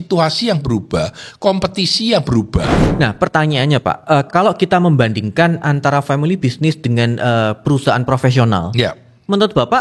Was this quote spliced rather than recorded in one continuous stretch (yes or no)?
yes